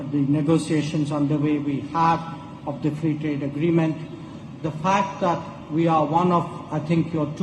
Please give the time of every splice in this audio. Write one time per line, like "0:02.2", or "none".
none